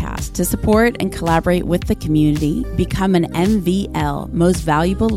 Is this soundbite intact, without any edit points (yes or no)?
yes